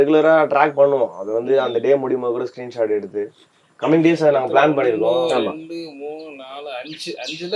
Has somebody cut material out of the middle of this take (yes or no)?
no